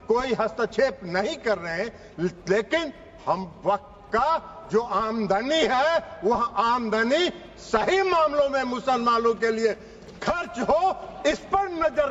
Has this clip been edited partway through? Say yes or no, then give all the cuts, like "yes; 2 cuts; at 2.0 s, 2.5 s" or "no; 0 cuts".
no; 0 cuts